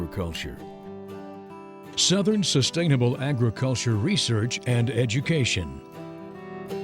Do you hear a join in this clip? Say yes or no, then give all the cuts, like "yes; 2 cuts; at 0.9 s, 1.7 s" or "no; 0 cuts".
yes; 1 cut; at 5.7 s